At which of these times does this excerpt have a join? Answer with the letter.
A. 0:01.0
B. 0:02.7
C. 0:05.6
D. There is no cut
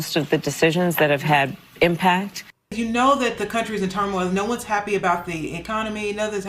B